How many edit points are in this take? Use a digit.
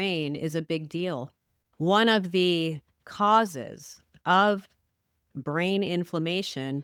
0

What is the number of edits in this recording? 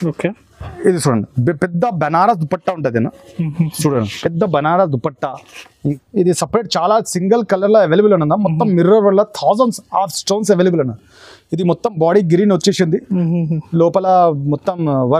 1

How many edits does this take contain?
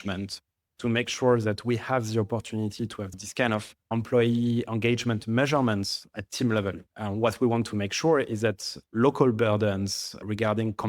3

